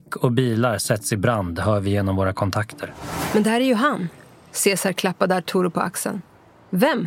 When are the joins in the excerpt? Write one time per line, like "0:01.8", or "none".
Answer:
none

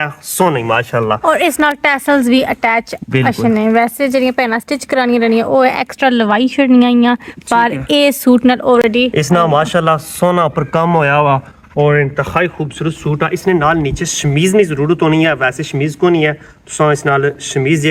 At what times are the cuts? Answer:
none

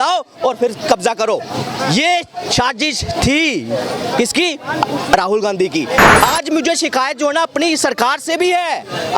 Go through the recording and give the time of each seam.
0:06.1

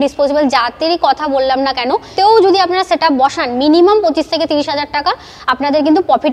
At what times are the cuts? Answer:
0:02.1

